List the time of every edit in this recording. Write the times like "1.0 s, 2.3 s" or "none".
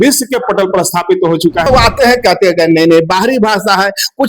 1.7 s